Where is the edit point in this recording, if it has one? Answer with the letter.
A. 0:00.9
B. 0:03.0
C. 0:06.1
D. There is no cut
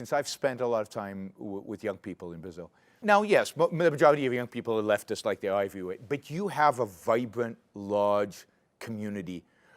B